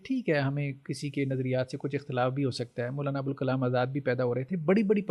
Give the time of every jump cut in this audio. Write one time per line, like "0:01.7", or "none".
none